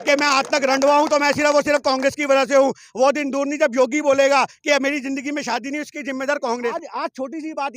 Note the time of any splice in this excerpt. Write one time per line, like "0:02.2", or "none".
0:06.7